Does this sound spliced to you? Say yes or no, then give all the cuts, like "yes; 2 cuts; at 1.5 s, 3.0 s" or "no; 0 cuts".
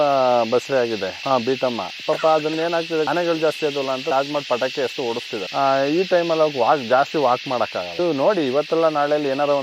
yes; 2 cuts; at 3.1 s, 4.1 s